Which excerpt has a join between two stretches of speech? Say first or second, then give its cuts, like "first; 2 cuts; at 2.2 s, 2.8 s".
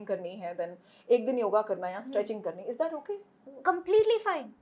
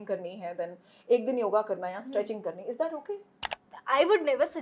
second; 1 cut; at 3.5 s